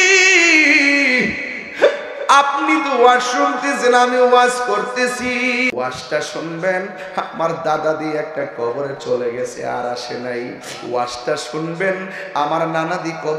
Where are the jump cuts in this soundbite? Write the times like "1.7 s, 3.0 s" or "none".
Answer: 5.7 s

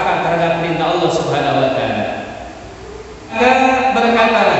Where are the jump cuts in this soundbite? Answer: 3.3 s

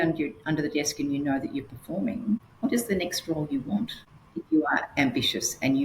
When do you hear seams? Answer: 2.5 s, 4.4 s

